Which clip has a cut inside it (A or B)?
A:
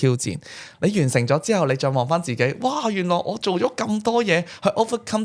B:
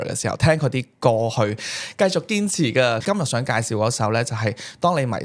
B